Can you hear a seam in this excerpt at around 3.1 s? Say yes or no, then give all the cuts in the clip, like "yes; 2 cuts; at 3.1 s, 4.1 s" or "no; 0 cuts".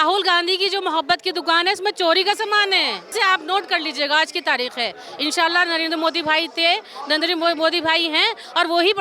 yes; 1 cut; at 3.1 s